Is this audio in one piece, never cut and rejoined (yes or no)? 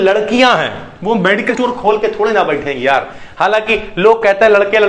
no